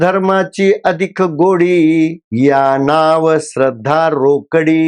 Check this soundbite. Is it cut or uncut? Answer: uncut